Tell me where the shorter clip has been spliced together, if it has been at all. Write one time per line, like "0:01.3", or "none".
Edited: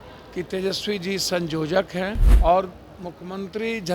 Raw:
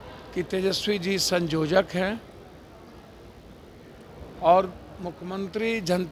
0:02.3